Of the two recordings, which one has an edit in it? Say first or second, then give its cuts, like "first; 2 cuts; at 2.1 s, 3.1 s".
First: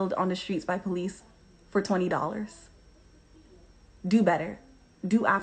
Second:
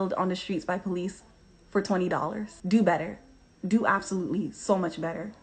second; 1 cut; at 2.5 s